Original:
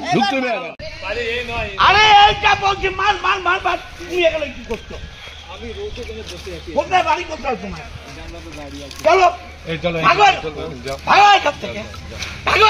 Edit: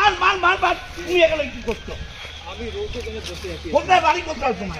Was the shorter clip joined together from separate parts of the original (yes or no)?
no